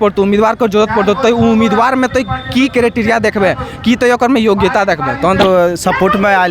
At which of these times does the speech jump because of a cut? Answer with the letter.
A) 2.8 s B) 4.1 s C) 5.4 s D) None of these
C